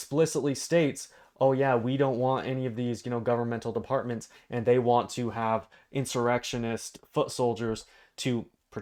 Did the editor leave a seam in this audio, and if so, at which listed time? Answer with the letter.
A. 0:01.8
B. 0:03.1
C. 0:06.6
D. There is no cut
D